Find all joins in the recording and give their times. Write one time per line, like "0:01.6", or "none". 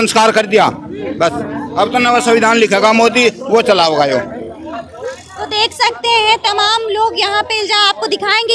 none